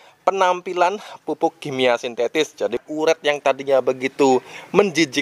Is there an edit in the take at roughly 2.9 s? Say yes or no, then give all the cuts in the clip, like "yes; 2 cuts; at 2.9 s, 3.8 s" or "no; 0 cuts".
yes; 1 cut; at 2.9 s